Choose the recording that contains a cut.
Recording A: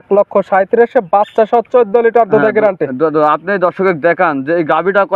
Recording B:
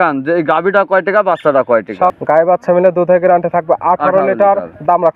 B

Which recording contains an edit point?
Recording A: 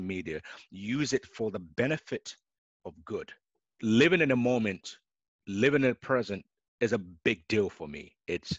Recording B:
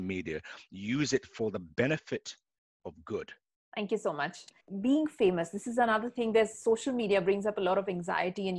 A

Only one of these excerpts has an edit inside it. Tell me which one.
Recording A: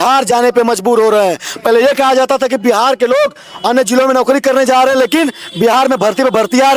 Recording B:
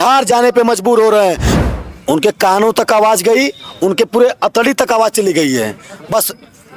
B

